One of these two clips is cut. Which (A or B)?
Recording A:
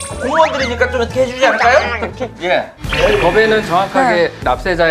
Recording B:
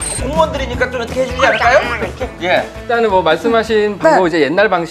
A